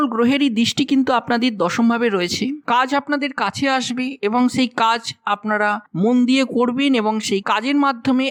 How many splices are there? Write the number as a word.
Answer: zero